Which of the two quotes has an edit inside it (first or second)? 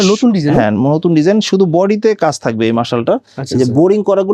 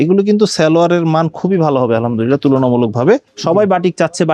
second